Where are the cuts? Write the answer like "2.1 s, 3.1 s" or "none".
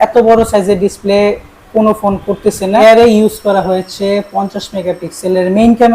2.8 s